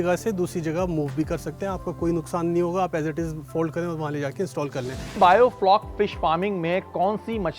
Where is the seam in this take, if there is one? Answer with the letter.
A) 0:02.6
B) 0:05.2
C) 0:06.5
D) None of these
B